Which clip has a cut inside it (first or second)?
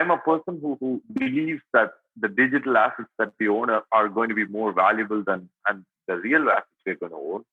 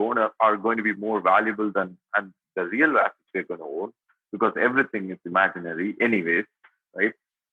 first